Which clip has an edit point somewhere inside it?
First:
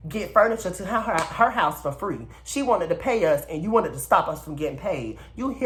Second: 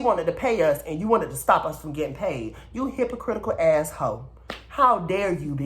second; 1 cut; at 4.2 s

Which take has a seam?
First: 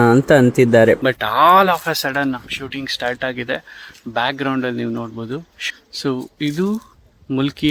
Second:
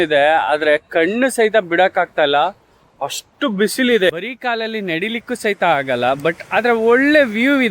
first; 2 cuts; at 1.1 s, 5.5 s

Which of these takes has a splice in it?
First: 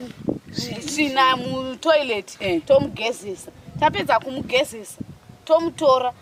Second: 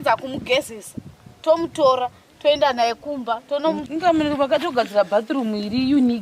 second; 1 cut; at 3.9 s

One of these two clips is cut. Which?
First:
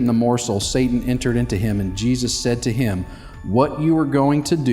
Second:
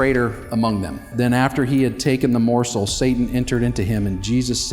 second; 1 cut; at 1.1 s

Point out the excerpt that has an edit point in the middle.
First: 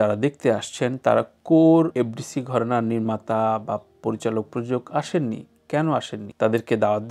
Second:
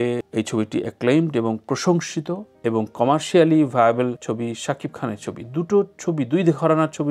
first; 2 cuts; at 1.9 s, 6.2 s

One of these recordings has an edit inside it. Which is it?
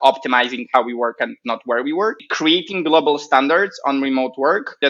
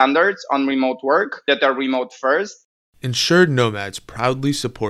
second; 1 cut; at 2.6 s

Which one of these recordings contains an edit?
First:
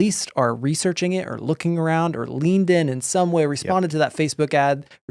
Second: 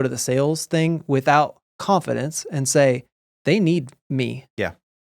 second; 1 cut; at 4.0 s

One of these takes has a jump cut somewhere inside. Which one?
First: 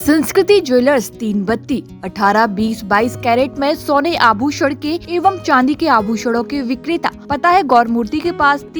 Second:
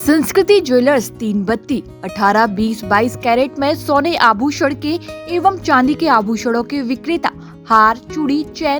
first; 2 cuts; at 5.0 s, 7.2 s

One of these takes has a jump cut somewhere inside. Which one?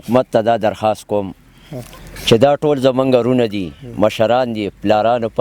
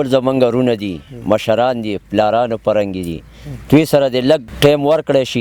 second; 1 cut; at 4.5 s

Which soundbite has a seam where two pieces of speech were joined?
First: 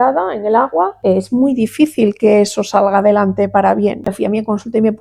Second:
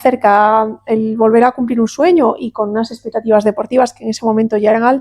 first; 2 cuts; at 1.0 s, 4.1 s

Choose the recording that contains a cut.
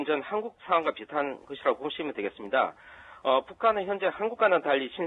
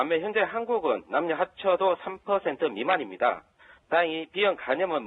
first; 1 cut; at 2.6 s

